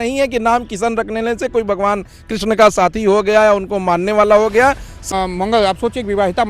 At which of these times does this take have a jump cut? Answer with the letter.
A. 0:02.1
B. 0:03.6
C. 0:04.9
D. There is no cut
C